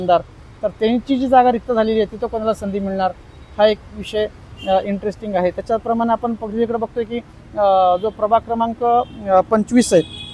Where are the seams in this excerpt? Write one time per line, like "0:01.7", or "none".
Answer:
none